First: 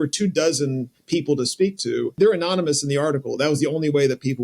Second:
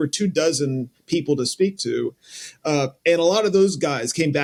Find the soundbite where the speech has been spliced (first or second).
first